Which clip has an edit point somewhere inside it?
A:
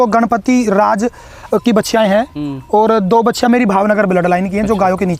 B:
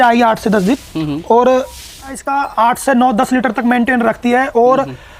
B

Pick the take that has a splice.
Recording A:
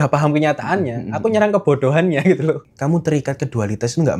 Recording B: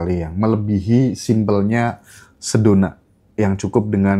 A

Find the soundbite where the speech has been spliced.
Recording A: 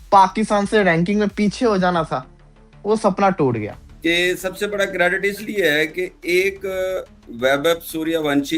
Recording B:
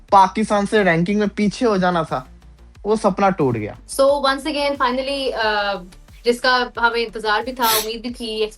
A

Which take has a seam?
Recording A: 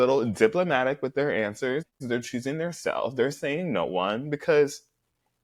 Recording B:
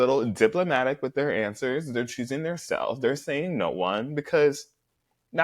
B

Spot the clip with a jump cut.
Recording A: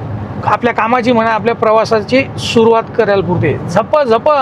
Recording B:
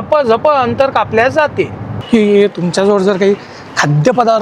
B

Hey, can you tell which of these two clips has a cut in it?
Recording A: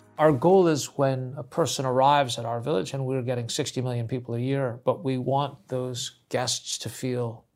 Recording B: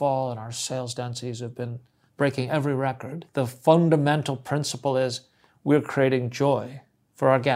B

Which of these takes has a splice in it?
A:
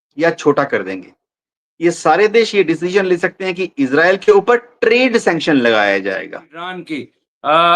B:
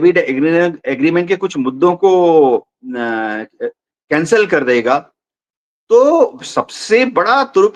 A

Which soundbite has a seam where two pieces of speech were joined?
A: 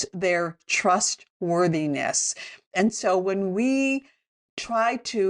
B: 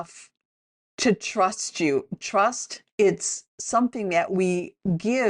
B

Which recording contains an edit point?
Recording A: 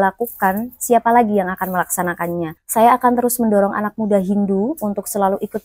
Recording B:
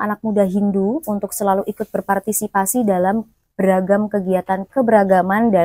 A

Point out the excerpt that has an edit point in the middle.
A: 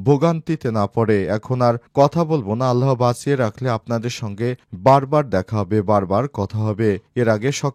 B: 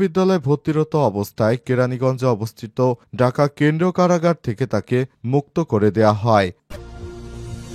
B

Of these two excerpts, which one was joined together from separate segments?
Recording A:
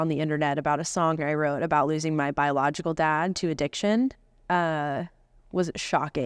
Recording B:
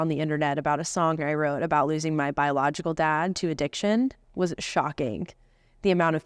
B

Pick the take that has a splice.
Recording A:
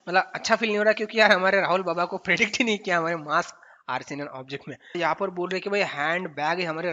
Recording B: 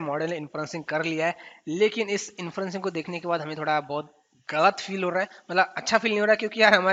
A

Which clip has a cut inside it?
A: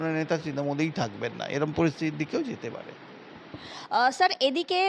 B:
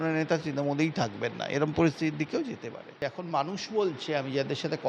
B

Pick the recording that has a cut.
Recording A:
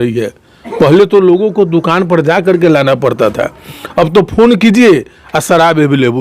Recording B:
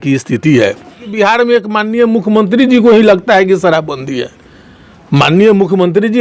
B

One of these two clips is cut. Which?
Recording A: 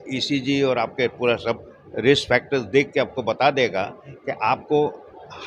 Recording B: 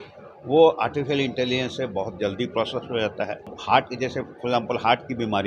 B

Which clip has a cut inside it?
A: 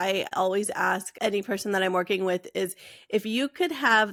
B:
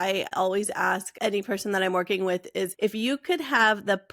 B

